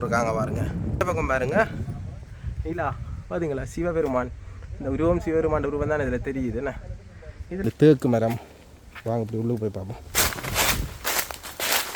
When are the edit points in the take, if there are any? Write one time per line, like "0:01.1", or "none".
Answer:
0:01.0
0:07.7